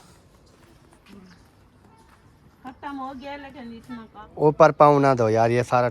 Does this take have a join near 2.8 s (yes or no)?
no